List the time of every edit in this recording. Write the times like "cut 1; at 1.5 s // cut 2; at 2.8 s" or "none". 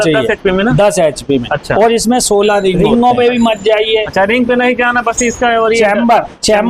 cut 1; at 2.8 s